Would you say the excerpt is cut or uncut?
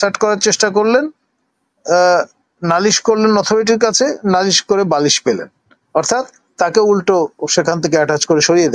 uncut